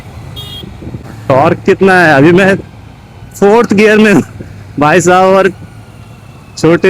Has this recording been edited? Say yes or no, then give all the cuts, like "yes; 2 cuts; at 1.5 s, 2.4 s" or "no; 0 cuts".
yes; 1 cut; at 1.0 s